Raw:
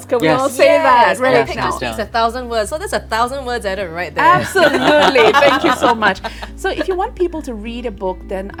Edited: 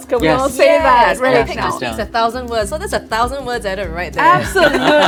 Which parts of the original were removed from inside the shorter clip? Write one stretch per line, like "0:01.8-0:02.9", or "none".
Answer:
none